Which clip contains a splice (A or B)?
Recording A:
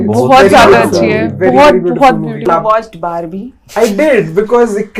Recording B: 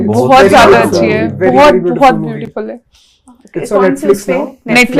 A